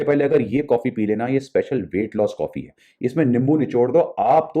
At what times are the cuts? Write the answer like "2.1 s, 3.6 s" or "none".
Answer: none